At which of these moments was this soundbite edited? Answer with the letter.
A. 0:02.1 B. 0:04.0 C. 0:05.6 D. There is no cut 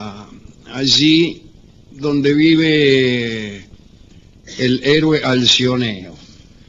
D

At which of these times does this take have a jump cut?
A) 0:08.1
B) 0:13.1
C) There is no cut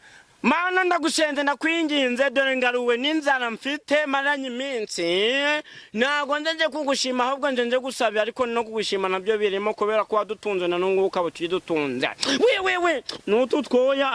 B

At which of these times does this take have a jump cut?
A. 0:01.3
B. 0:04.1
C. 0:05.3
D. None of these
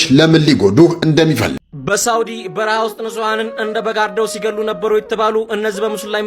A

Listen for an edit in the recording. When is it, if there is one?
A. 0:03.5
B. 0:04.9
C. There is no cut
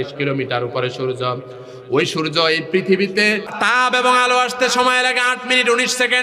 A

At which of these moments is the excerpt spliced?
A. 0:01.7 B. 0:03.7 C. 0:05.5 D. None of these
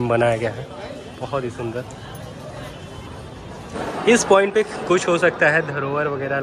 B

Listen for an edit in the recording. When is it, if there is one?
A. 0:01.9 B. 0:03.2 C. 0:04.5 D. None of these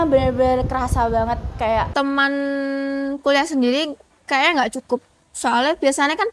A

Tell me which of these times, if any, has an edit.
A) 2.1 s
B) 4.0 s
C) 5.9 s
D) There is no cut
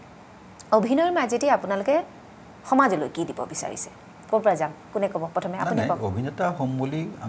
D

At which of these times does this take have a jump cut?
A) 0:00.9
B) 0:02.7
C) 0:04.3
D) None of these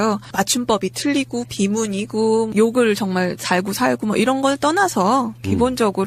A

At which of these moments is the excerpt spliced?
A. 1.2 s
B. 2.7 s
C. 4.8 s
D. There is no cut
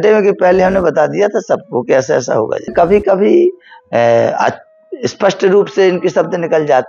B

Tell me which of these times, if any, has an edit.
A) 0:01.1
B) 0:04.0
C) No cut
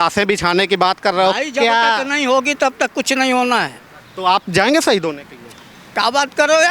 B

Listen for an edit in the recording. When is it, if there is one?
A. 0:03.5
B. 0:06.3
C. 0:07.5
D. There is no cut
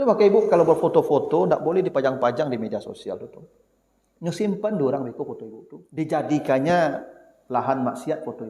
B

